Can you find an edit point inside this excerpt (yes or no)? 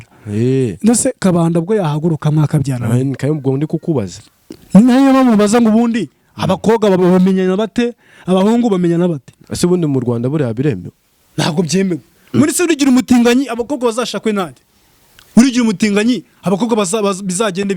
yes